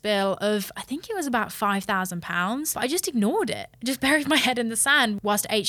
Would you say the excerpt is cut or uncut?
cut